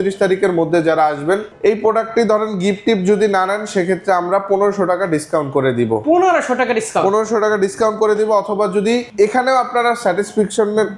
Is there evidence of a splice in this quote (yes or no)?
yes